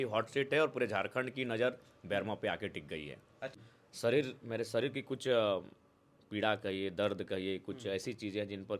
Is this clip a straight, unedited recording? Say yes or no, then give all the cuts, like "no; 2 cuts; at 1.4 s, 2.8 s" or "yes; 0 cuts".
no; 1 cut; at 3.6 s